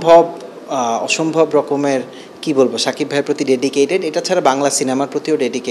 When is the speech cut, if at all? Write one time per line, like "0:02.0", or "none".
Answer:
none